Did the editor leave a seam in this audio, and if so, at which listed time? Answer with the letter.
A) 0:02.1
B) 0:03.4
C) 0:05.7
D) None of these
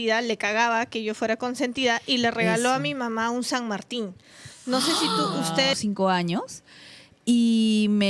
C